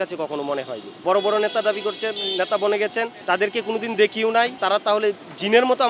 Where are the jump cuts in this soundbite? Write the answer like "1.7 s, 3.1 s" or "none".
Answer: 0.9 s, 4.5 s